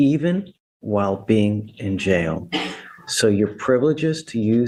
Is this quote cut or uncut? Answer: uncut